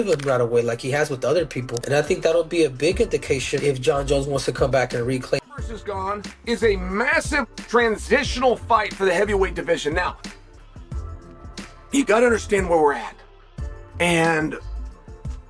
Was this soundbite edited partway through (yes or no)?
yes